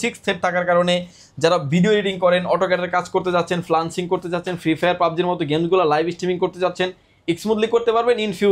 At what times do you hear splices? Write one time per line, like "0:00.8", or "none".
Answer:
none